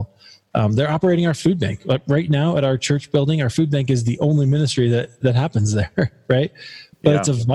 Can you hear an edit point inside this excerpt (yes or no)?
no